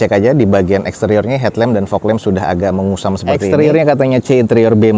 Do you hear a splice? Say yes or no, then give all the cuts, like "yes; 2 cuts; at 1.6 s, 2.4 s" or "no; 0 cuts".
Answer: yes; 1 cut; at 3.3 s